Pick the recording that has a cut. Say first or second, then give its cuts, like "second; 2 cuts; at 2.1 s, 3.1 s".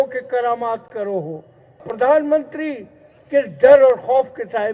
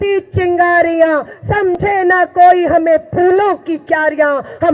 first; 1 cut; at 1.9 s